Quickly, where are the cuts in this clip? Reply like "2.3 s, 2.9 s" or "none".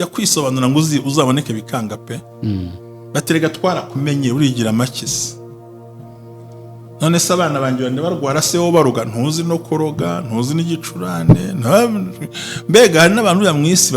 5.2 s, 7.0 s

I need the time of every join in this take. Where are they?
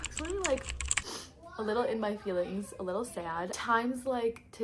3.5 s

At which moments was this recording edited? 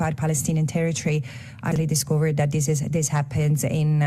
1.7 s

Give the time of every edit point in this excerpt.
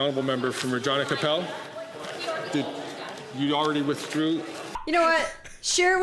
4.7 s

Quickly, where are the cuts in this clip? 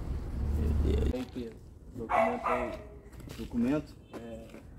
1.1 s

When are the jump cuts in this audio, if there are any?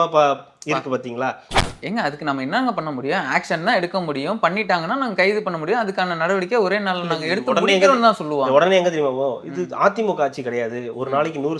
1.7 s

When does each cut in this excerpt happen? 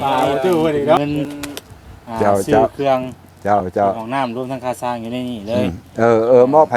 1.0 s

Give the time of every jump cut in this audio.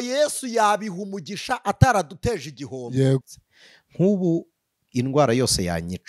3.4 s

